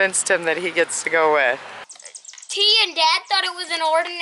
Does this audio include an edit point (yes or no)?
yes